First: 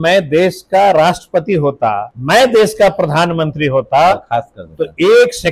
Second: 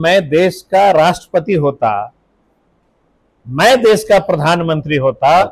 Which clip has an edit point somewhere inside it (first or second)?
first